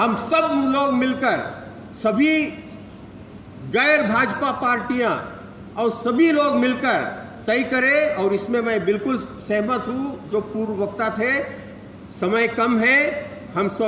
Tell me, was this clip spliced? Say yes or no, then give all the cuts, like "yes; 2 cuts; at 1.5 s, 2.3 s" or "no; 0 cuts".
no; 0 cuts